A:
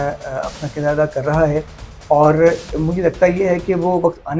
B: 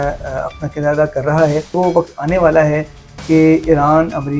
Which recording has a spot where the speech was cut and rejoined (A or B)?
B